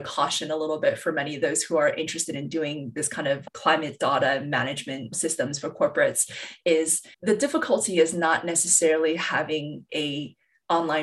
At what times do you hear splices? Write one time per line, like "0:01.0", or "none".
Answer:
none

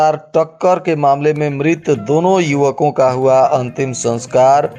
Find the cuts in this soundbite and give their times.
none

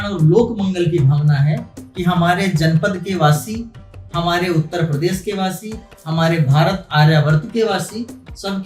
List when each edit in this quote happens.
none

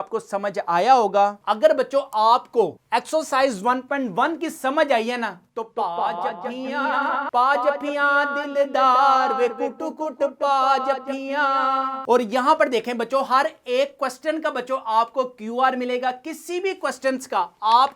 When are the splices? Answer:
0:01.4

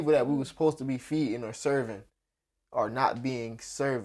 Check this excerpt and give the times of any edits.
none

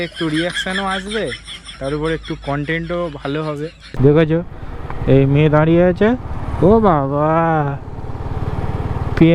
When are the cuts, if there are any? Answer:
0:03.8

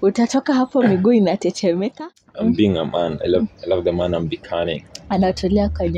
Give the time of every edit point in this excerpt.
0:02.0

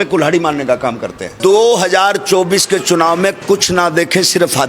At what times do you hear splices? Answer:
0:01.2

